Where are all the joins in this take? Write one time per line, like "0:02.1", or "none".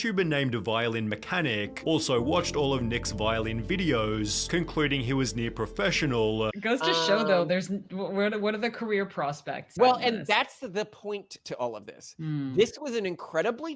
0:06.5
0:09.7